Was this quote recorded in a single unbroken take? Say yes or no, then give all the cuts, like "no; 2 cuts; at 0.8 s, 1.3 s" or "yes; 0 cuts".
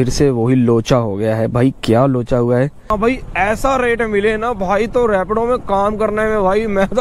no; 1 cut; at 2.9 s